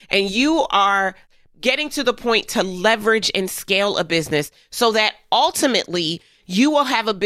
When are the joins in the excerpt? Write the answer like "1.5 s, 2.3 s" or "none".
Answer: 1.2 s